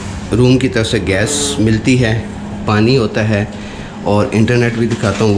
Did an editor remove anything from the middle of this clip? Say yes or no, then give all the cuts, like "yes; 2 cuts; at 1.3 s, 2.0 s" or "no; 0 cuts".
no; 0 cuts